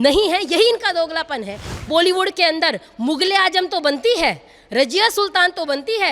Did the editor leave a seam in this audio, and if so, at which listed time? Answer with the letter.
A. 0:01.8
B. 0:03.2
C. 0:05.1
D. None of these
A